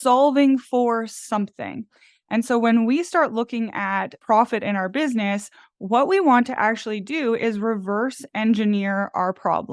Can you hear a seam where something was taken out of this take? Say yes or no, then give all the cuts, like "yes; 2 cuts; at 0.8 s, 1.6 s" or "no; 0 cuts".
yes; 1 cut; at 4.1 s